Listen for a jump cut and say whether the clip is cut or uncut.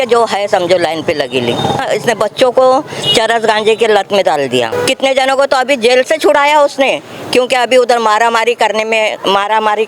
cut